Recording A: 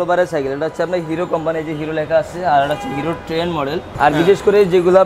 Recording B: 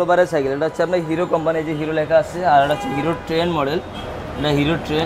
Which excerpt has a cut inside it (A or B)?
A